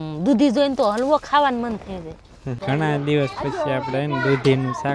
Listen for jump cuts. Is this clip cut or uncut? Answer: cut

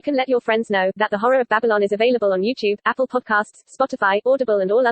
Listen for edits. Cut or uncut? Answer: uncut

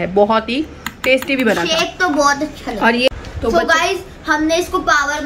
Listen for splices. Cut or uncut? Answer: cut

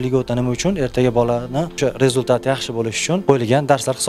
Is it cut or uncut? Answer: cut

